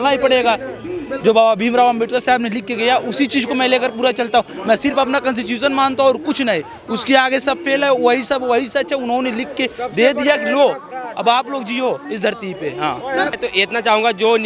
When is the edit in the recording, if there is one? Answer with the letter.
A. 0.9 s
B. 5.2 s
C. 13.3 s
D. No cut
C